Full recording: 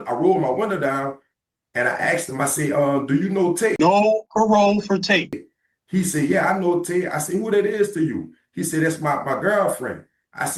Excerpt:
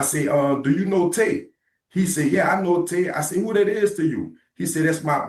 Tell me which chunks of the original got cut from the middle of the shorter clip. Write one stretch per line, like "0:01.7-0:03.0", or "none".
0:03.8-0:05.3